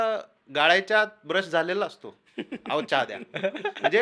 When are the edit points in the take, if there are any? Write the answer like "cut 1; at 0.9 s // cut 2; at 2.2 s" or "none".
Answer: none